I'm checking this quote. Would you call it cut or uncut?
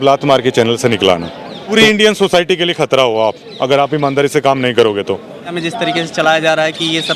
cut